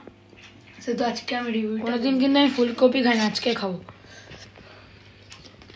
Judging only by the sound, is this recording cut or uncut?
cut